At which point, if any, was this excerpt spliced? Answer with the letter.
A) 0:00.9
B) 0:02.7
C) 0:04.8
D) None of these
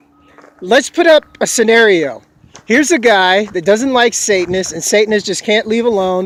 D